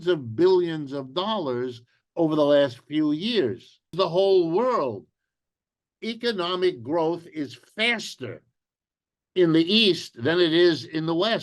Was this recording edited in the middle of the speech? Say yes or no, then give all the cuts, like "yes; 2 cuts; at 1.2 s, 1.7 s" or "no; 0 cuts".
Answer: yes; 1 cut; at 3.9 s